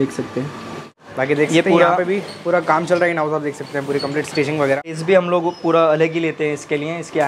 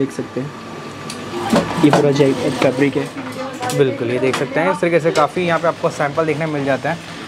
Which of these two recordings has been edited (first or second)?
first